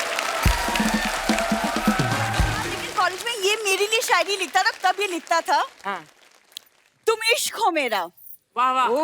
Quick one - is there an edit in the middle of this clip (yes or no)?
yes